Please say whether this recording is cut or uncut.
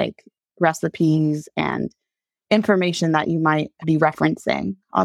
cut